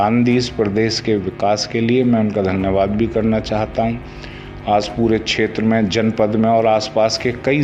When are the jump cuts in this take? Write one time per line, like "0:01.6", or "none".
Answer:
none